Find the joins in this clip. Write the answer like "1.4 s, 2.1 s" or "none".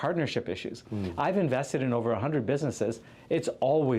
none